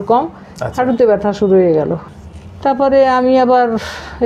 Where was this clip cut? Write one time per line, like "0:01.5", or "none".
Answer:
0:02.1